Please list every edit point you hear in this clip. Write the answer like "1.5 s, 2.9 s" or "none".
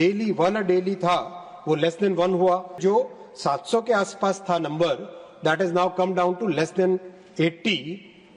2.8 s